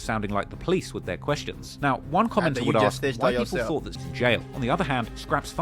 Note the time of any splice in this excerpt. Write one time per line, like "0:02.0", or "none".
0:04.0